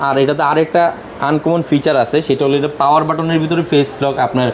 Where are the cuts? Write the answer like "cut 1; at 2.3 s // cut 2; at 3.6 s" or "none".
none